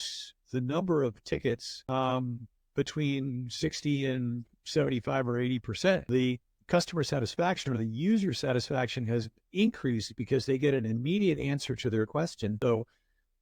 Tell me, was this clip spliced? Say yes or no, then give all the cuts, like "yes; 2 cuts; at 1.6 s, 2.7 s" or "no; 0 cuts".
yes; 3 cuts; at 1.7 s, 6.0 s, 12.6 s